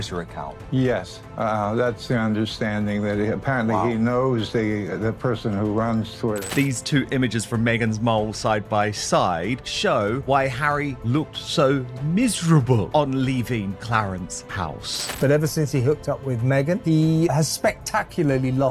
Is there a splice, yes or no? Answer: yes